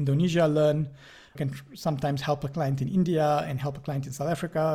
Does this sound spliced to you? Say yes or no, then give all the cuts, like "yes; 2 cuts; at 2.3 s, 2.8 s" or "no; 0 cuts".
yes; 1 cut; at 1.4 s